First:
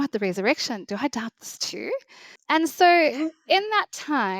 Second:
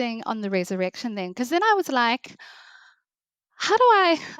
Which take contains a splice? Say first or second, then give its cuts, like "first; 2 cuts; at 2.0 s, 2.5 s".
first; 1 cut; at 2.3 s